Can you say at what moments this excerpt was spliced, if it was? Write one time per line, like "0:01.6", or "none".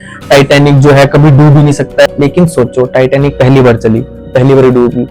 0:02.1